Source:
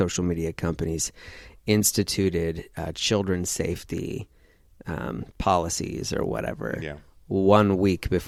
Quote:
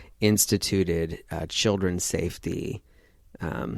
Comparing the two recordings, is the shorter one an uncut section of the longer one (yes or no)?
yes